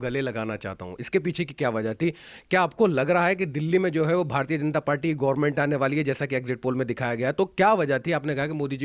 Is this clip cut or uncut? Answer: uncut